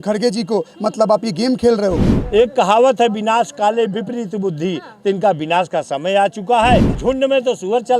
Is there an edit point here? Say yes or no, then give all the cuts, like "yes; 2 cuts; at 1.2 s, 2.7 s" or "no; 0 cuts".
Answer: yes; 2 cuts; at 2.1 s, 6.9 s